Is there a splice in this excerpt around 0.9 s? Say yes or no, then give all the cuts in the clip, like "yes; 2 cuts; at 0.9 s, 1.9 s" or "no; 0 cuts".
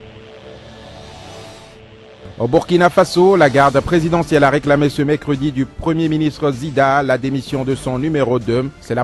yes; 1 cut; at 0.9 s